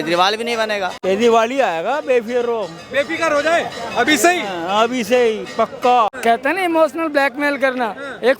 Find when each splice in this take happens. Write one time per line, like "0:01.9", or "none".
0:01.0
0:06.2